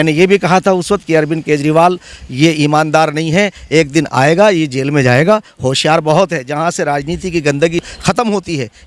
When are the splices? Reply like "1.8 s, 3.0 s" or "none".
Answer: 7.8 s